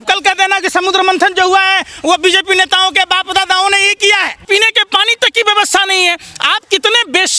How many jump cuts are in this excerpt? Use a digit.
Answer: 1